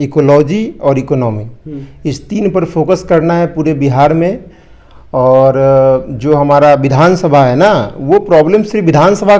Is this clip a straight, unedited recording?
yes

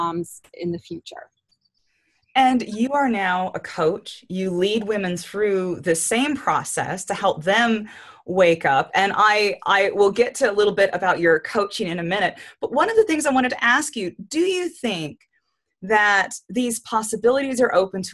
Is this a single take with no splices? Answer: yes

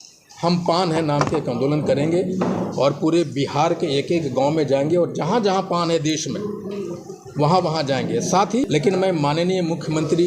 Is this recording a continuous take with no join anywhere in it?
no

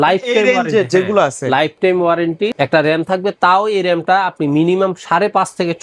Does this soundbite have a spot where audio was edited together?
no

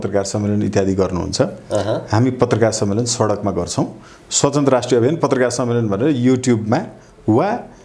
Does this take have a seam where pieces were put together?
no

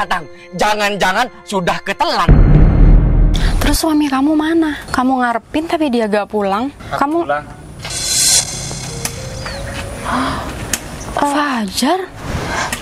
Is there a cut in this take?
yes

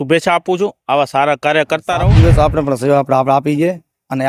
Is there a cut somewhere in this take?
yes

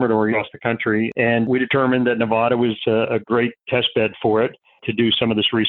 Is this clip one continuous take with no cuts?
no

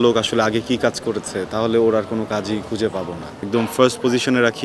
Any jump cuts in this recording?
yes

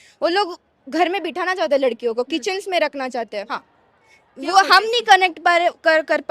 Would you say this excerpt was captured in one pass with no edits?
no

